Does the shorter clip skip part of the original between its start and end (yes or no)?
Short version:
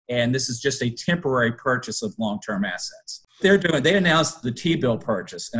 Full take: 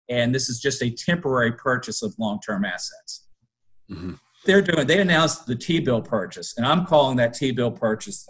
yes